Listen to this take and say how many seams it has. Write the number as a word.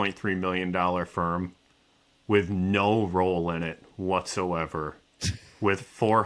zero